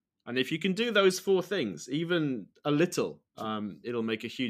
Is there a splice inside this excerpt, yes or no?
no